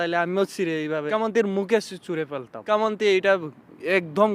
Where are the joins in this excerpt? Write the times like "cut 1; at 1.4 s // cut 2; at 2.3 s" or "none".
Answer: cut 1; at 1.1 s // cut 2; at 2.5 s